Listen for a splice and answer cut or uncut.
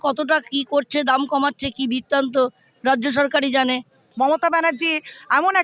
cut